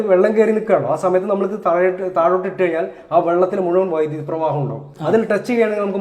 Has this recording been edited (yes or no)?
yes